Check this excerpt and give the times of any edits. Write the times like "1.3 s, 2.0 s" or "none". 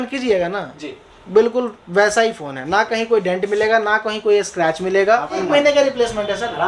5.4 s